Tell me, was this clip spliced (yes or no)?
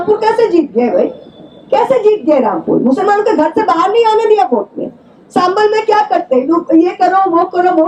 no